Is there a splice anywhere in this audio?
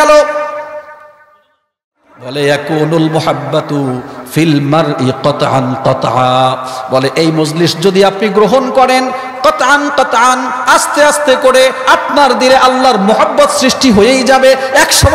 yes; 1 cut; at 2.0 s

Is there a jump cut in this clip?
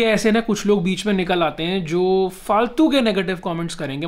no; 0 cuts

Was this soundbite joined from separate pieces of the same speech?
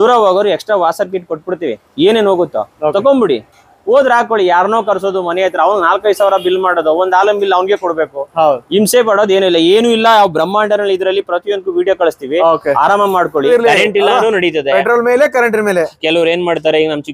yes; 1 cut; at 13.5 s

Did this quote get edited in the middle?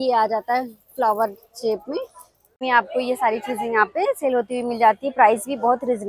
yes; 1 cut; at 2.6 s

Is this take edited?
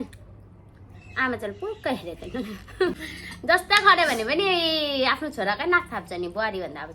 yes; 1 cut; at 3.0 s

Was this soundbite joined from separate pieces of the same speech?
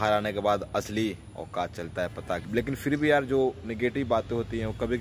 yes; 1 cut; at 2.4 s

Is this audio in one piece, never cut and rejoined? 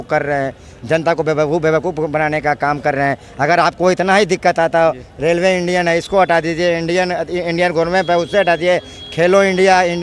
yes; 0 cuts

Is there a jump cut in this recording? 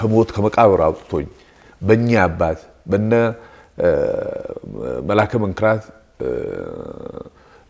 no; 0 cuts

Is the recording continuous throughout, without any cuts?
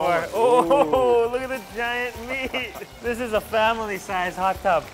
yes; 0 cuts

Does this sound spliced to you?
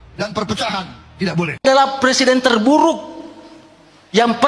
yes; 1 cut; at 1.6 s

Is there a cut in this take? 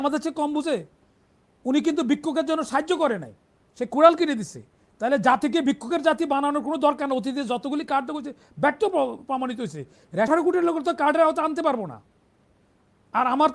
yes; 1 cut; at 10.3 s

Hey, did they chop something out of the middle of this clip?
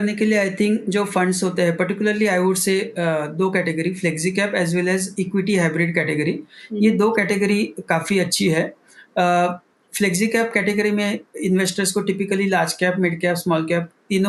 no; 0 cuts

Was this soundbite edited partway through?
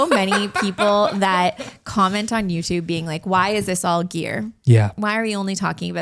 yes; 1 cut; at 5.0 s

